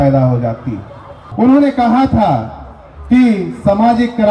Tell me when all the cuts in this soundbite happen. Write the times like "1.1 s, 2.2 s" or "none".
1.2 s